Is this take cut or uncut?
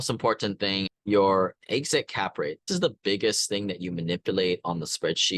cut